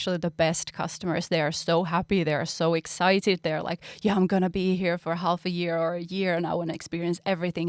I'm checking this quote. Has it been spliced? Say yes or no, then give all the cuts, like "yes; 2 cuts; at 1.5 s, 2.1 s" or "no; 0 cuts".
no; 0 cuts